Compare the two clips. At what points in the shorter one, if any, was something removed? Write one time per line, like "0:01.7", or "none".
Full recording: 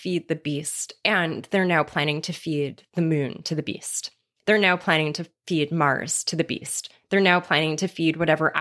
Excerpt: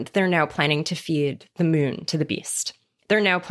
none